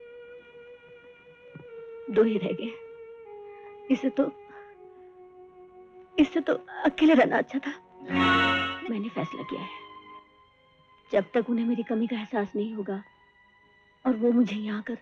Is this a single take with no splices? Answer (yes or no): no